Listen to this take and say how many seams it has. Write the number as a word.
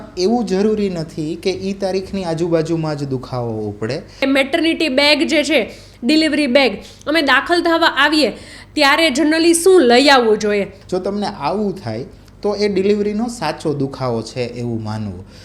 two